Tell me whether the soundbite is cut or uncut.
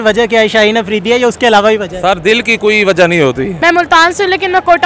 cut